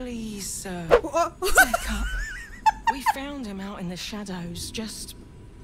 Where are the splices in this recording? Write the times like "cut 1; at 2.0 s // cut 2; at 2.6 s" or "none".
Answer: none